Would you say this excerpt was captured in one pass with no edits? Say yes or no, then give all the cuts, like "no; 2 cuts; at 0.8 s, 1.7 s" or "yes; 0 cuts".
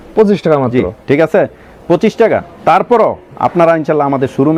yes; 0 cuts